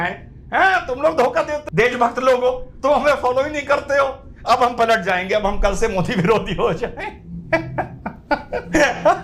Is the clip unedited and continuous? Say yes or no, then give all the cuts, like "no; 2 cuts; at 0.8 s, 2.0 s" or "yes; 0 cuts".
no; 1 cut; at 1.7 s